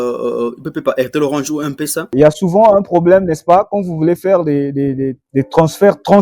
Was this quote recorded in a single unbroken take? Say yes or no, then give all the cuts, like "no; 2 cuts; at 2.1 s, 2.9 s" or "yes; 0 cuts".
no; 1 cut; at 2.1 s